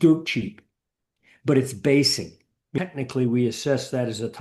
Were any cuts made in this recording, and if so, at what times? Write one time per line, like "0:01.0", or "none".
0:02.8